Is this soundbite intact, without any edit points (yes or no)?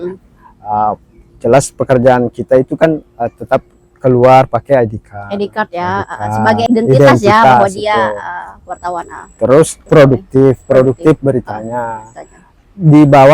no